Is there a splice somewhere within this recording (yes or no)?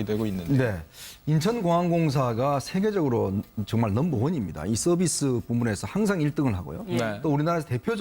yes